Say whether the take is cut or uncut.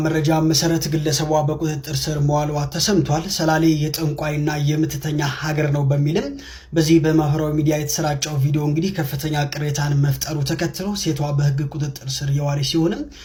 uncut